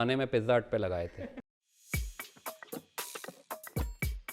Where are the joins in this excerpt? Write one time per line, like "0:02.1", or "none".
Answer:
0:01.4